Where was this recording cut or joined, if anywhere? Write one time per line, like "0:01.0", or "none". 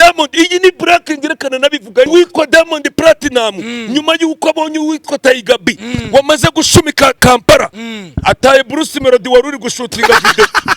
0:02.1